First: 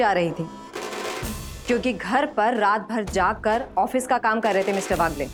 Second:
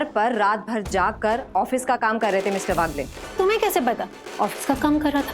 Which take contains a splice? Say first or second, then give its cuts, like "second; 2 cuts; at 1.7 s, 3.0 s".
second; 1 cut; at 4.2 s